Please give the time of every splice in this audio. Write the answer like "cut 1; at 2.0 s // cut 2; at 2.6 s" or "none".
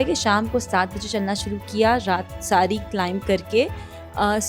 none